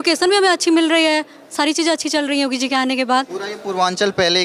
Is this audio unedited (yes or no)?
yes